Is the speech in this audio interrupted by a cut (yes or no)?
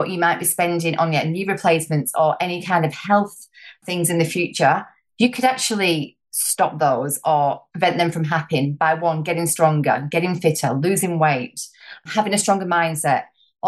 yes